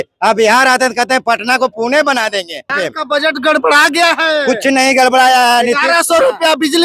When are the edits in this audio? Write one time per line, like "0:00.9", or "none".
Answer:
0:02.8